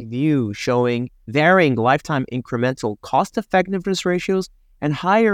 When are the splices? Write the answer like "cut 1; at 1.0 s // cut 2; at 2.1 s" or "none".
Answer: cut 1; at 1.2 s